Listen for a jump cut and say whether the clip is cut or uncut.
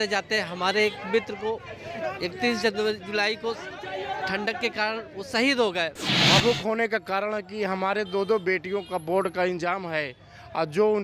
cut